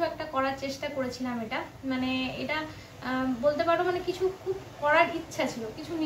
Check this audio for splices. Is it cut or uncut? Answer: uncut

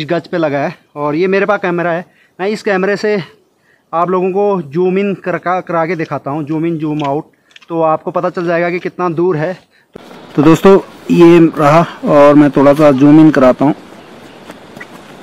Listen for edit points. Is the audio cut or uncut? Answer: cut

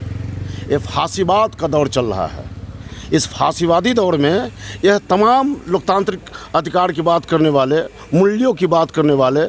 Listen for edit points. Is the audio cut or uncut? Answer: uncut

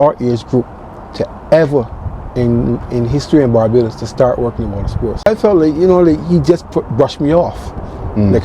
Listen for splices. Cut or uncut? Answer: cut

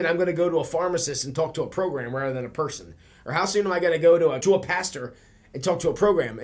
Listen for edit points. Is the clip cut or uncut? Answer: cut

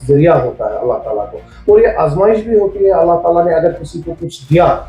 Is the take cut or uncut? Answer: uncut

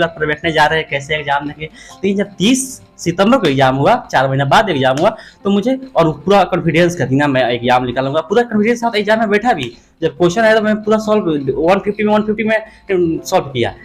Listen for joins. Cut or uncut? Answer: uncut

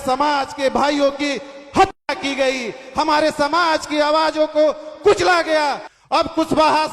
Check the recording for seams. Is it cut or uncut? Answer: cut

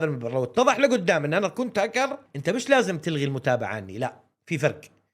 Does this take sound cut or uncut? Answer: cut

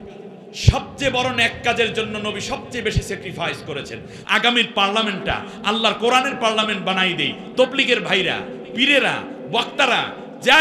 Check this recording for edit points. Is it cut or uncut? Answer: cut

